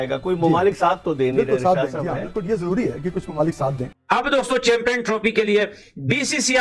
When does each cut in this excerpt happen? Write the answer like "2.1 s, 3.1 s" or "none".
none